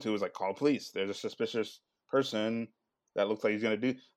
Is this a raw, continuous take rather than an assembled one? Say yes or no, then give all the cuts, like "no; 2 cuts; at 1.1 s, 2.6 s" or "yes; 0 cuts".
yes; 0 cuts